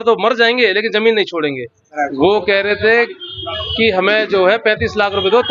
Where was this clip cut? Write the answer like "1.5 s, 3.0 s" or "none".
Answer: 2.0 s